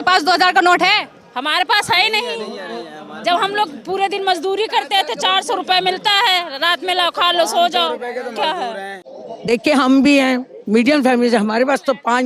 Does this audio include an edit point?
yes; 1 cut; at 9.1 s

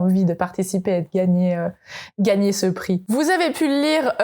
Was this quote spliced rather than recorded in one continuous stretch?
no; 0 cuts

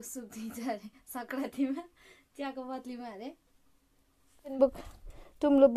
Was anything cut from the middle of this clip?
yes; 1 cut; at 4.6 s

